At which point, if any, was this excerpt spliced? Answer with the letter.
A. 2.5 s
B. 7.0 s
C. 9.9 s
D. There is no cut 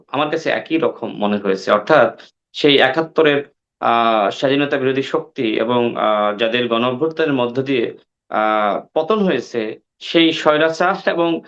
D